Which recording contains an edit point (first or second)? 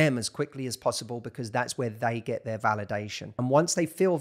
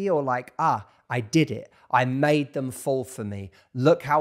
first